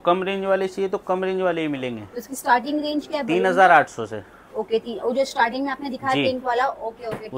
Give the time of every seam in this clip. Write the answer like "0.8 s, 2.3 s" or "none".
none